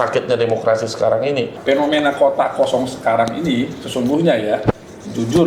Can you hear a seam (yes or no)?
yes